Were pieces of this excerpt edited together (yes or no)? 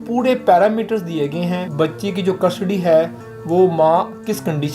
yes